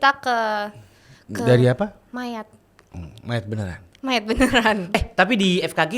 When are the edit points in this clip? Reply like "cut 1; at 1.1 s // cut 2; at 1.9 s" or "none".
cut 1; at 4.9 s

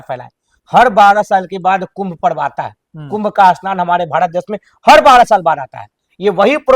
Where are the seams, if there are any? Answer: none

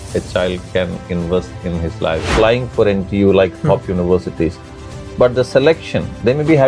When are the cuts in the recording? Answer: cut 1; at 2.3 s

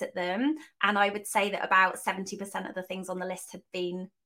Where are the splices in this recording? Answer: none

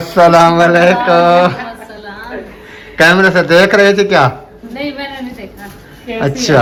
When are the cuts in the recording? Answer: none

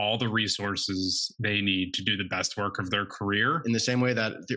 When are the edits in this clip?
cut 1; at 3.6 s

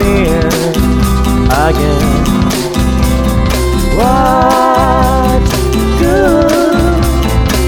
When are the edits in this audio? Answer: none

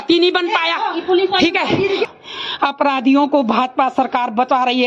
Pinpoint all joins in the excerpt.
cut 1; at 2.0 s

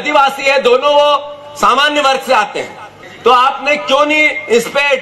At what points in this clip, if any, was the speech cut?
cut 1; at 2.9 s

